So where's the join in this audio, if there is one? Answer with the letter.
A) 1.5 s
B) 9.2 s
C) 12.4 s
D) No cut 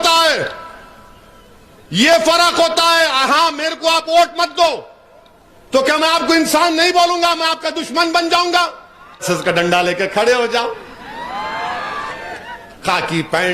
B